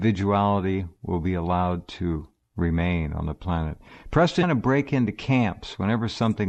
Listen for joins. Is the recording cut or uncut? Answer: uncut